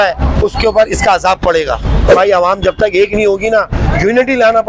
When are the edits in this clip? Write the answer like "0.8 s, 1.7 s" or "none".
2.1 s